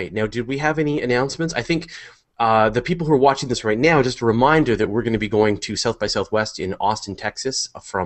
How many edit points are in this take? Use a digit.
0